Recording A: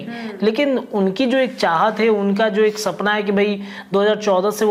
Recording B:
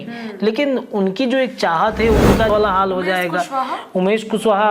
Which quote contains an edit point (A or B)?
B